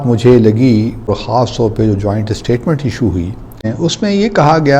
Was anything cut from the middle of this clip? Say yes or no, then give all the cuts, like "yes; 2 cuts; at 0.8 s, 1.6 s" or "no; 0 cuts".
yes; 2 cuts; at 1.1 s, 3.7 s